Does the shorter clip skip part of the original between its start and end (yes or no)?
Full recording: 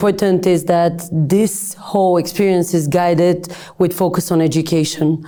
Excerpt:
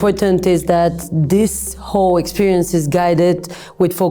no